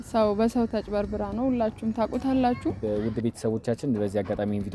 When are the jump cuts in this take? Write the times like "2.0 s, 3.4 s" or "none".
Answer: 2.8 s